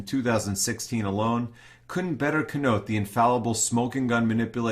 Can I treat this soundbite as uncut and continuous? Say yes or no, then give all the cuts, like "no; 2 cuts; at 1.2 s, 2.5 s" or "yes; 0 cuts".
no; 1 cut; at 3.7 s